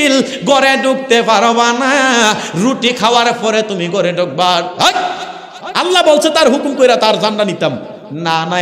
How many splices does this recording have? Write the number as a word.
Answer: zero